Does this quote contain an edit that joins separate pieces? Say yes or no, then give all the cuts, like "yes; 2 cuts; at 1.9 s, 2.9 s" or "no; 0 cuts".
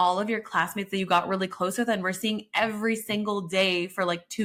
no; 0 cuts